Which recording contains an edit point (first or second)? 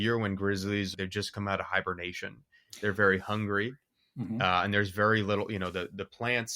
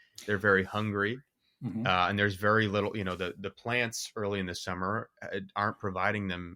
first